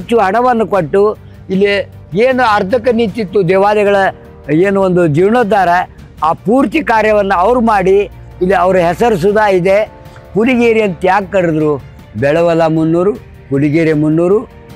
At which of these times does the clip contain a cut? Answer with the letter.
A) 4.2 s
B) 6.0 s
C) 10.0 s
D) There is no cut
C